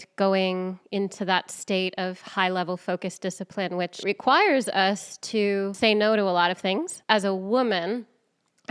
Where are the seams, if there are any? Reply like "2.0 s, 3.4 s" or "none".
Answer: 4.0 s, 5.7 s, 6.9 s